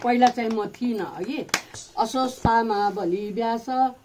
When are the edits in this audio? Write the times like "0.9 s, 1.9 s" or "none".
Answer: 1.7 s